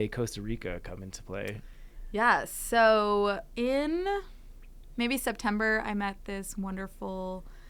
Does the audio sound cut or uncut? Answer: uncut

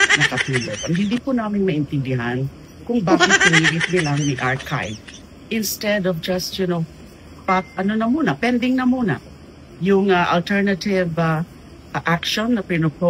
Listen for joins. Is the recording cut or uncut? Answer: uncut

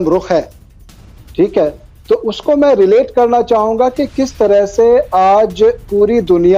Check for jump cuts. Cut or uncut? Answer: uncut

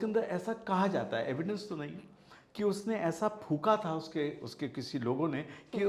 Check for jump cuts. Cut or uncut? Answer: uncut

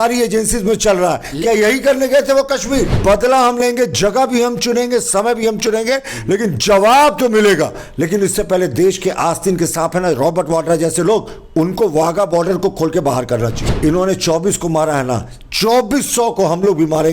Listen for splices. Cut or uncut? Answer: cut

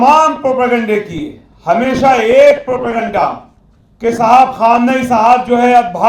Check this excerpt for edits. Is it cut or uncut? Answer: uncut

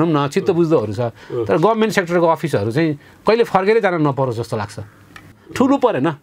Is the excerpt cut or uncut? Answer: cut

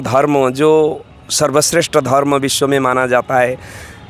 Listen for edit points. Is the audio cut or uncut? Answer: uncut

